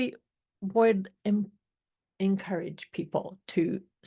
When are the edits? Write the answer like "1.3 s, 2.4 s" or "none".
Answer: none